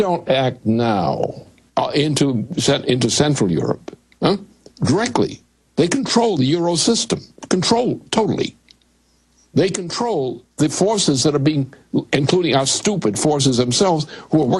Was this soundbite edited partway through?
no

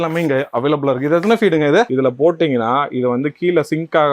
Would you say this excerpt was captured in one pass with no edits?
no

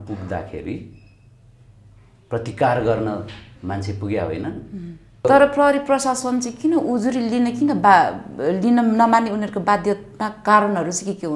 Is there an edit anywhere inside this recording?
yes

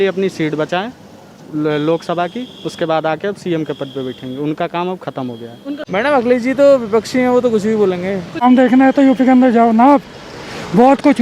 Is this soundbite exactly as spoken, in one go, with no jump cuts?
no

